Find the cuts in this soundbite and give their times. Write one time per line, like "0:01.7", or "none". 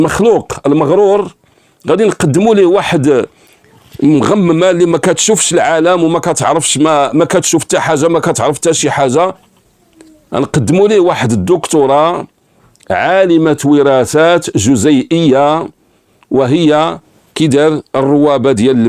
none